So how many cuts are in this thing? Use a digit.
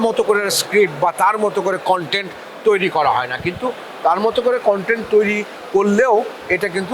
0